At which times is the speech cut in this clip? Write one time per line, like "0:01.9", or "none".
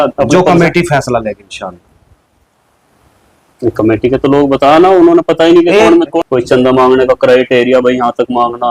0:06.1